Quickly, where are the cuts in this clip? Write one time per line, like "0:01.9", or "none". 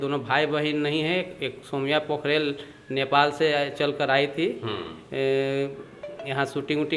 none